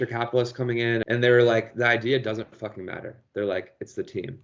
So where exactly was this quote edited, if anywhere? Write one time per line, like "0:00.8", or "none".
0:01.0